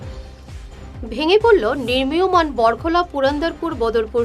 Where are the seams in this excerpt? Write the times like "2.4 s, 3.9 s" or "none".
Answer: 0.9 s